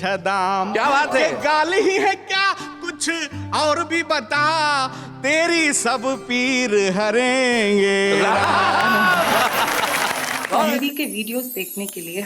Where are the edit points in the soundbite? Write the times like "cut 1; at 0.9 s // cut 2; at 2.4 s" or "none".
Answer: cut 1; at 10.6 s